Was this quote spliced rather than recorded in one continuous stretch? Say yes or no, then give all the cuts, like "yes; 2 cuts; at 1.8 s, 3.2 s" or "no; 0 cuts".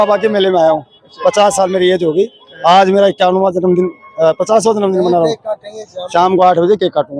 no; 0 cuts